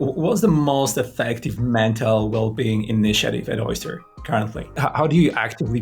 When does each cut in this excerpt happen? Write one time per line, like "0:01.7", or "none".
0:04.6